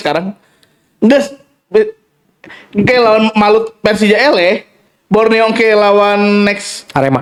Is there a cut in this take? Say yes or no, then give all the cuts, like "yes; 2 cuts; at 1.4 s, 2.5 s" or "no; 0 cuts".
no; 0 cuts